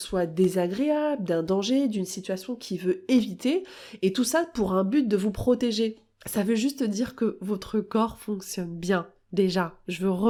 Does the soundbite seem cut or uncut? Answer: uncut